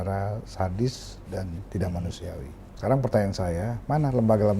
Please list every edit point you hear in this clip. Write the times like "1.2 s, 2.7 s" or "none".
2.6 s